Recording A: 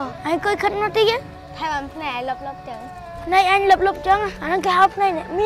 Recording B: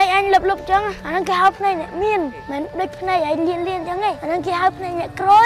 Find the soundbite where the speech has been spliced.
A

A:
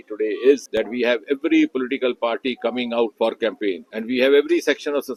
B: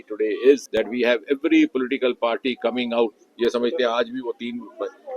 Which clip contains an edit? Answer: B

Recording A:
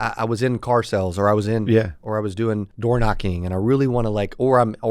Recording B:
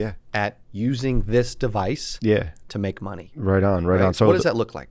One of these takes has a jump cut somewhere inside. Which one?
A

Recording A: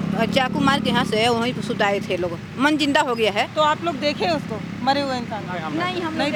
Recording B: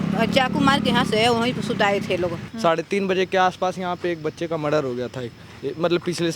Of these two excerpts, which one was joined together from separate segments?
B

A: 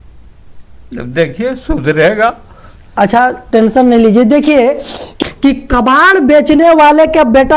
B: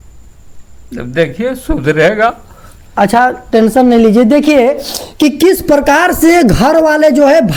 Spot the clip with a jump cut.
A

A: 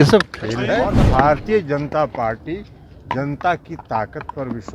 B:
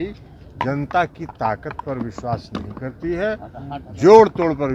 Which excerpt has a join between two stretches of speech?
A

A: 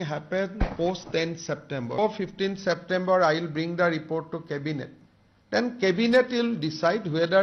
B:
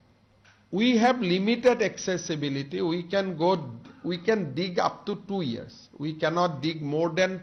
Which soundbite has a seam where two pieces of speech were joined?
A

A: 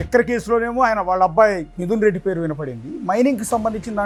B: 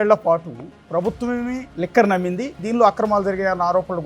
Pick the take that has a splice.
B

